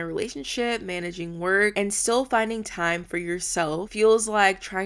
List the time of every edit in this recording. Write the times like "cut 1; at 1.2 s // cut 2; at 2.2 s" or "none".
cut 1; at 1.7 s // cut 2; at 3.9 s